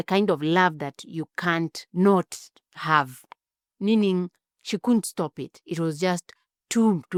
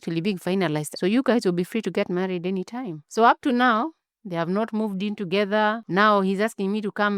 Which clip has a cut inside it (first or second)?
second